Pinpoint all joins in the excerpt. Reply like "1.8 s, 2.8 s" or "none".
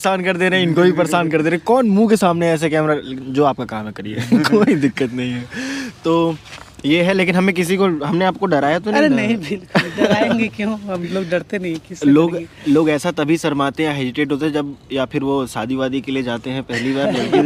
none